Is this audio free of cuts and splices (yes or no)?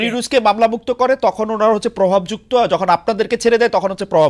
yes